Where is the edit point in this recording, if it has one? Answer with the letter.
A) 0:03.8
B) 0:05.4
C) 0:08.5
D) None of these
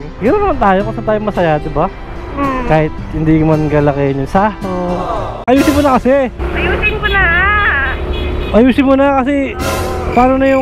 B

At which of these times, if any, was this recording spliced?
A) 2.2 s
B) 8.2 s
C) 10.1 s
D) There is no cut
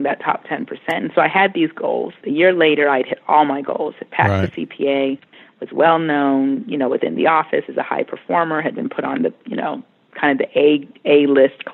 A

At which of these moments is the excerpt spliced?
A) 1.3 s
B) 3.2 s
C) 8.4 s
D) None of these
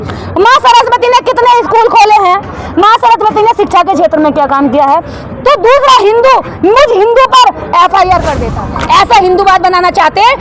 C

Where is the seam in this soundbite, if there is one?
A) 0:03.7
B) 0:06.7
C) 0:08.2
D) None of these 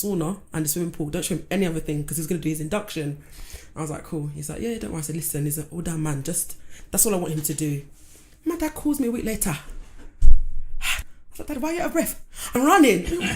B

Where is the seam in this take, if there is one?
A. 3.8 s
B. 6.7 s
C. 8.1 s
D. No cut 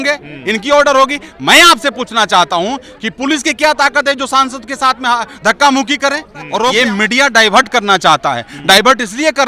B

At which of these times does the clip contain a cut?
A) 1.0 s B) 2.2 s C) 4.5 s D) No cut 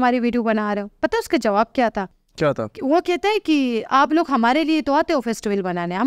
B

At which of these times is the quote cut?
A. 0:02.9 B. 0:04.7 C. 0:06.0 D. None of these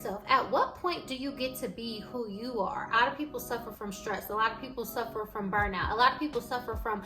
A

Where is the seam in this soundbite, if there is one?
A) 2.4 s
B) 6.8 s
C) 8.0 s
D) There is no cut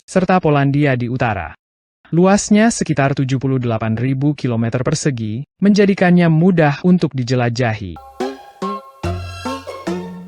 C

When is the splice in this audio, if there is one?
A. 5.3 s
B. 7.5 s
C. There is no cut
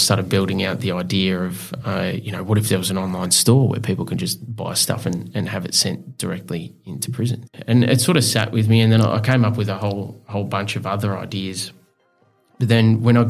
B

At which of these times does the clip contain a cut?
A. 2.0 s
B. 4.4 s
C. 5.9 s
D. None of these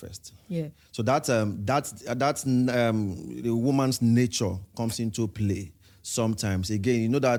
D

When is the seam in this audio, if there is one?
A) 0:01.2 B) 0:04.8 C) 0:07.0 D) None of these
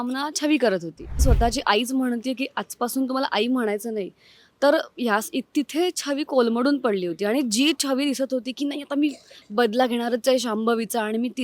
A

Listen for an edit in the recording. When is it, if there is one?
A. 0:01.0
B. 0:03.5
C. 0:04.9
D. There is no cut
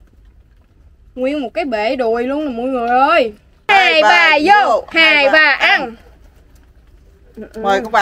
B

